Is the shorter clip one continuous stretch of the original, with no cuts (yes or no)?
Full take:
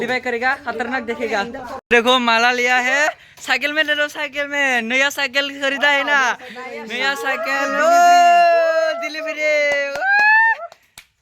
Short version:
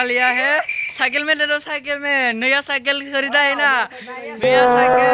yes